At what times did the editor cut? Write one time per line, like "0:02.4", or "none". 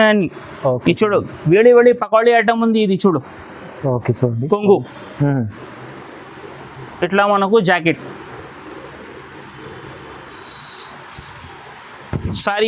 none